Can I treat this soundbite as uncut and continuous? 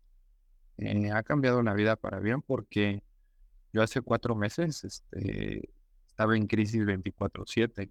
yes; 0 cuts

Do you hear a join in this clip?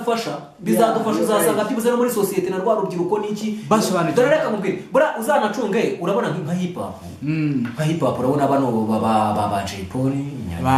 no; 0 cuts

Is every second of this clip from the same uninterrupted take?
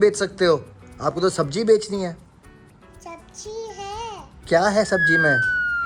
yes; 0 cuts

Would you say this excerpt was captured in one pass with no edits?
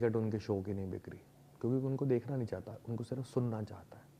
yes; 0 cuts

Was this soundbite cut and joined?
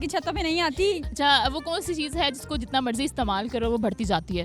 yes; 1 cut; at 1.1 s

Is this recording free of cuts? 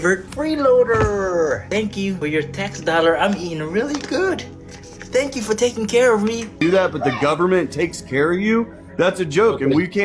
no; 2 cuts; at 1.9 s, 6.5 s

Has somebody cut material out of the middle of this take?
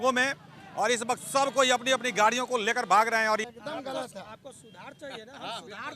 yes; 1 cut; at 3.5 s

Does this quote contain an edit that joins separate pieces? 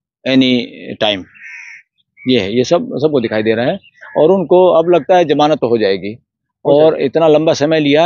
no; 0 cuts

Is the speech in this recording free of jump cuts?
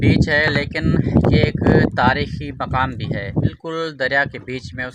no; 1 cut; at 3.6 s

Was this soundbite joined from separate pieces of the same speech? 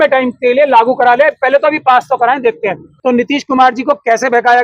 yes; 1 cut; at 2.9 s

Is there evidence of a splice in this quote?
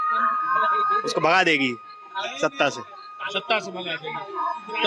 no; 0 cuts

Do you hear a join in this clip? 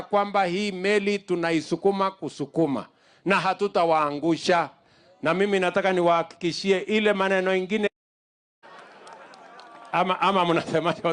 no; 0 cuts

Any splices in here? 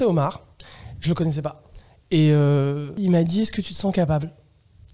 yes; 1 cut; at 2.9 s

